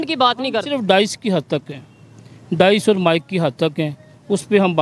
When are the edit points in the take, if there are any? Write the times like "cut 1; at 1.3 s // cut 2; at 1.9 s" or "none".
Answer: none